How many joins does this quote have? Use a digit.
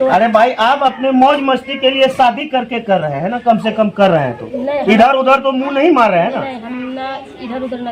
0